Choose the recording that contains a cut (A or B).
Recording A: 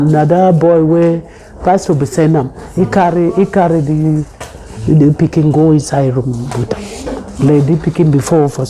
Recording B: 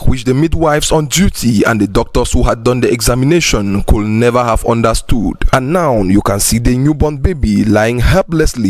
B